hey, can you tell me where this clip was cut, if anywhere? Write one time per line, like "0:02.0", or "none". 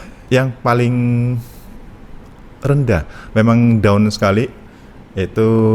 none